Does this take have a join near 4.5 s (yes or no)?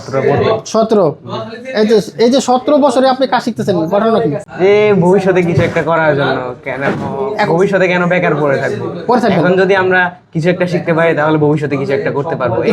yes